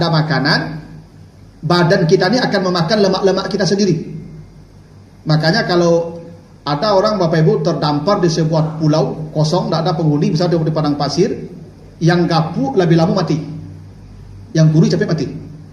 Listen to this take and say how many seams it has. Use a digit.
0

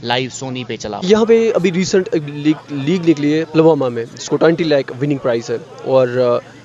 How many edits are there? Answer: 1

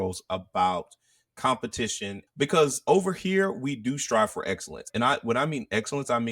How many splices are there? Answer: 2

